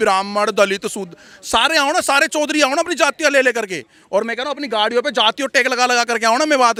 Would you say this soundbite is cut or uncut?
uncut